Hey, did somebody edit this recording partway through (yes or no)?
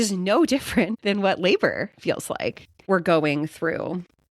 yes